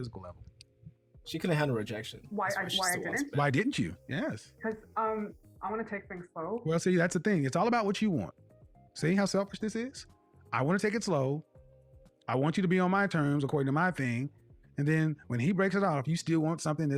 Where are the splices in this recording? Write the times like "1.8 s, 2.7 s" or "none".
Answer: none